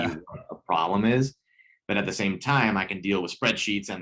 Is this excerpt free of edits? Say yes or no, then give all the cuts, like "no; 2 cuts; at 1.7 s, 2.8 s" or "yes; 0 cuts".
yes; 0 cuts